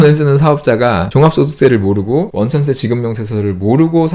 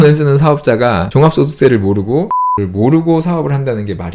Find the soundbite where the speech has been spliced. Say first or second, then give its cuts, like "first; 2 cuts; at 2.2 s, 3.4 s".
second; 1 cut; at 2.3 s